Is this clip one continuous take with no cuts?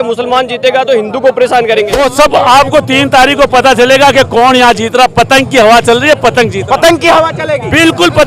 no; 1 cut; at 1.9 s

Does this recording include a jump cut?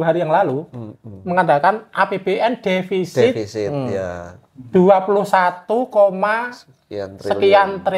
no; 0 cuts

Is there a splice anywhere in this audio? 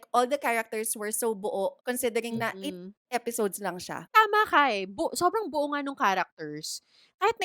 yes; 2 cuts; at 1.8 s, 4.2 s

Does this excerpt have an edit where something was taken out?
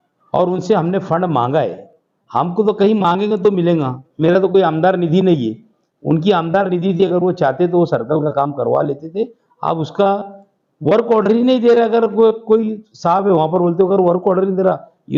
no; 0 cuts

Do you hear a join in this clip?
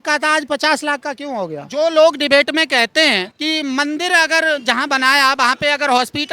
yes; 2 cuts; at 1.6 s, 3.3 s

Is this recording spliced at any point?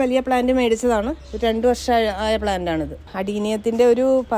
yes; 1 cut; at 3.0 s

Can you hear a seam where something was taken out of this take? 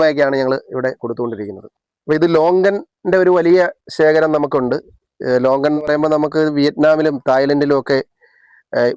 yes; 1 cut; at 1.6 s

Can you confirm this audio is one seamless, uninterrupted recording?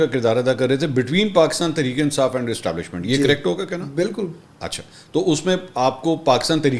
yes; 0 cuts

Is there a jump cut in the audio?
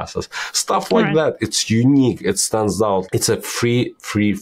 yes; 1 cut; at 3.0 s

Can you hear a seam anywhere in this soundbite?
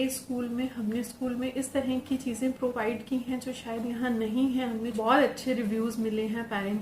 yes; 1 cut; at 4.9 s

